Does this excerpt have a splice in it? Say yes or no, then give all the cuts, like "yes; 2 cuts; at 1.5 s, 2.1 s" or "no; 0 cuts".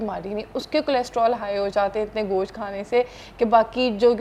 no; 0 cuts